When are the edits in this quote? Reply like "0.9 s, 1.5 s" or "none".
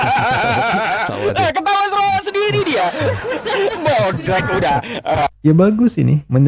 none